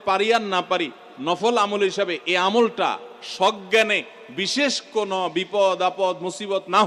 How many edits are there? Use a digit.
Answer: 0